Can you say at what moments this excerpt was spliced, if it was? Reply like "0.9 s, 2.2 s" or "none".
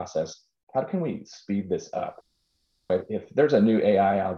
none